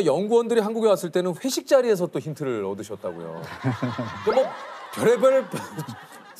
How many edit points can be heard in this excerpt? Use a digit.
0